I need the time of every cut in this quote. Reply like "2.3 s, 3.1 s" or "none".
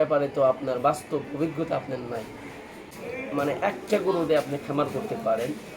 2.8 s